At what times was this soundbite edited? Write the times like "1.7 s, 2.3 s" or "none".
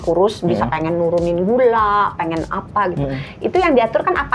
none